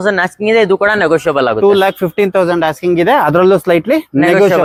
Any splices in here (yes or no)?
no